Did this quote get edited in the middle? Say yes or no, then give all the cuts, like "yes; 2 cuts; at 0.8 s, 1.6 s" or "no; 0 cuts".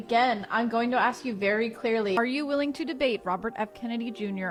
no; 0 cuts